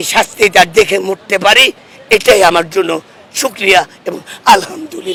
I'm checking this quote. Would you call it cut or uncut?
uncut